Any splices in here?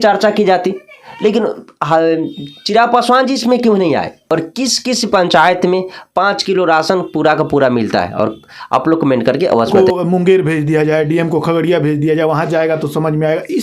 yes; 2 cuts; at 4.2 s, 9.7 s

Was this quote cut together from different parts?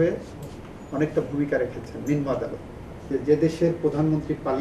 yes; 1 cut; at 3.1 s

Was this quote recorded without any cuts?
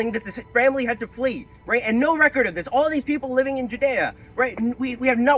yes; 0 cuts

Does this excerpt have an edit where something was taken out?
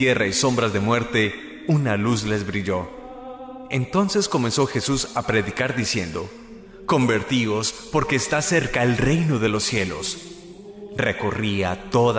no; 0 cuts

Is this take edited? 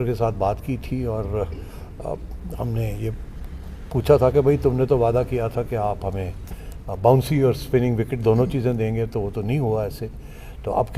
no; 0 cuts

